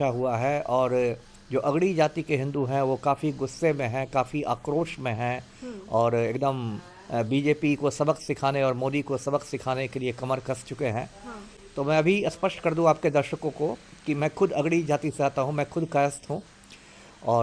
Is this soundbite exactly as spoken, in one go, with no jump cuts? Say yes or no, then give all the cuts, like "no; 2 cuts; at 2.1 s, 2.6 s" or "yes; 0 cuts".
yes; 0 cuts